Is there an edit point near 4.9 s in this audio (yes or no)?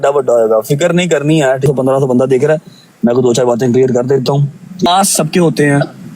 yes